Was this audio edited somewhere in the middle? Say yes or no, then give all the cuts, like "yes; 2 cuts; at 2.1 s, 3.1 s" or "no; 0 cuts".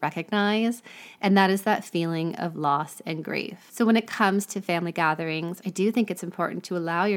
yes; 1 cut; at 3.6 s